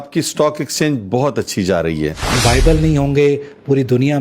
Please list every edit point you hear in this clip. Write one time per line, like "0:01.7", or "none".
0:02.4